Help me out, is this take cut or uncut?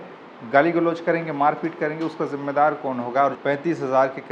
cut